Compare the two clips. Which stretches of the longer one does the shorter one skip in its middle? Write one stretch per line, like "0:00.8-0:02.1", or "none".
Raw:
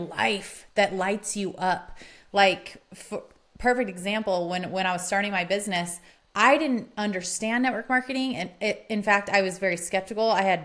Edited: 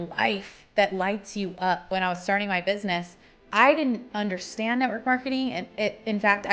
0:01.8-0:04.7